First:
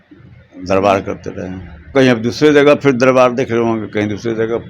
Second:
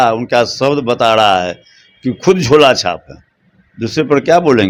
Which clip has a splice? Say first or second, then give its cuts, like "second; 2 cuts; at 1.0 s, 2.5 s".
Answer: first; 1 cut; at 1.9 s